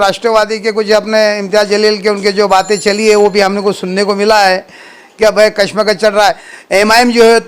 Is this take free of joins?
no; 1 cut; at 6.4 s

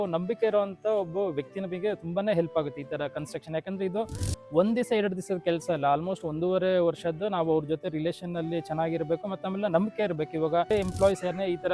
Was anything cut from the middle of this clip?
yes; 1 cut; at 10.7 s

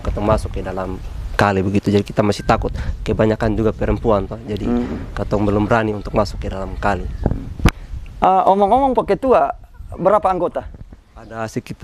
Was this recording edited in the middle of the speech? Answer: no; 0 cuts

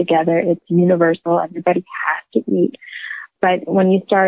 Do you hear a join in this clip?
yes; 1 cut; at 3.3 s

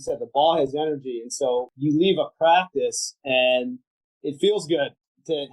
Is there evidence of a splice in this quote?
yes; 1 cut; at 1.7 s

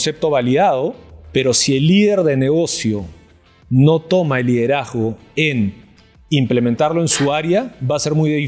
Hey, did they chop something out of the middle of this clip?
no; 0 cuts

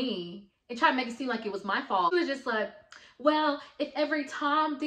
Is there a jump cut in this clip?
yes; 1 cut; at 2.1 s

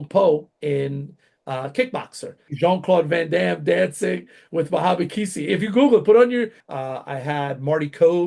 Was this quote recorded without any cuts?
no; 2 cuts; at 2.4 s, 6.6 s

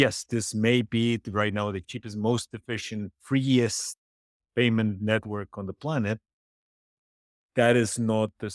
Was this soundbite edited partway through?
yes; 1 cut; at 1.8 s

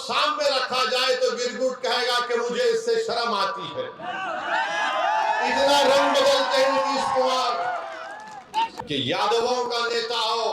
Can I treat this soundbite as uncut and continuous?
no; 1 cut; at 8.7 s

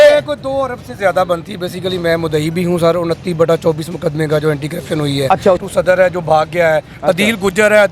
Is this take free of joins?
no; 1 cut; at 5.6 s

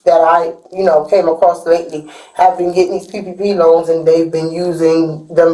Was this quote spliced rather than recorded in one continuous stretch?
no; 0 cuts

